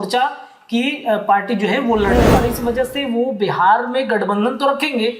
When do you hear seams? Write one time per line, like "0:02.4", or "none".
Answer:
0:02.4